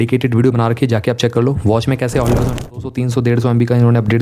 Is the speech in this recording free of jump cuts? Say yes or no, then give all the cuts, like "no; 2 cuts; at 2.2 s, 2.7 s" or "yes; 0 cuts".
no; 1 cut; at 2.7 s